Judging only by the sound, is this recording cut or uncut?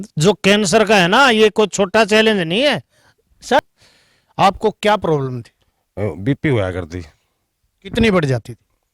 cut